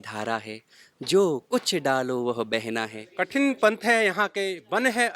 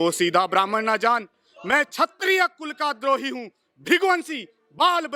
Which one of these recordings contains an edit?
first; 1 cut; at 3.0 s

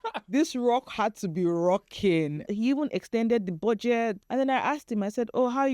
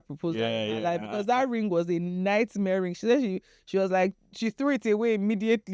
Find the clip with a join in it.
first; 2 cuts; at 2.5 s, 4.2 s

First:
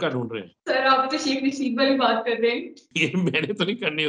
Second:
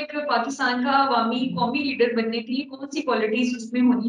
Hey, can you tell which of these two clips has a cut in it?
first; 1 cut; at 2.8 s

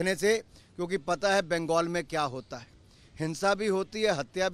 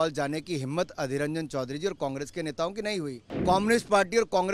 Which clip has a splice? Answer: second; 1 cut; at 3.3 s

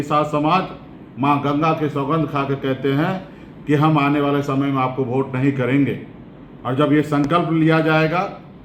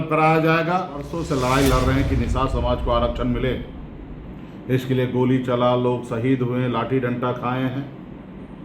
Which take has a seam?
second; 1 cut; at 1.2 s

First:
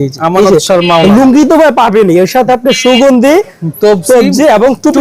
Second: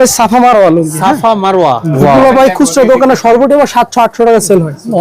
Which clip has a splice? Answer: second; 1 cut; at 1.9 s

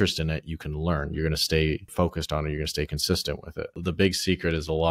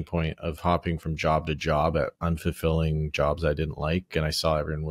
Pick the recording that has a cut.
first; 2 cuts; at 1.9 s, 3.8 s

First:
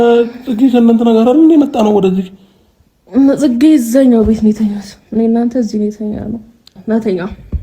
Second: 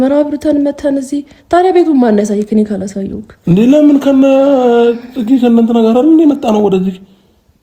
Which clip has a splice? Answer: first; 1 cut; at 6.7 s

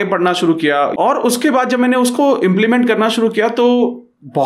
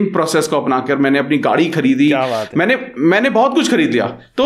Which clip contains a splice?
first; 1 cut; at 0.9 s

